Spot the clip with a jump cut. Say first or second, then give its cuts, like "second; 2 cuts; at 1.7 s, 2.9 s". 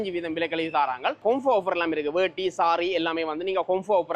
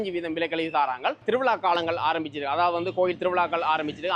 first; 1 cut; at 1.2 s